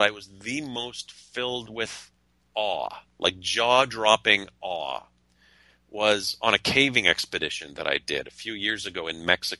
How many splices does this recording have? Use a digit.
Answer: 0